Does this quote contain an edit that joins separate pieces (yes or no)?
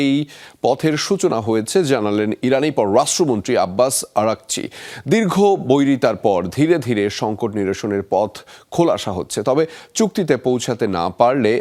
no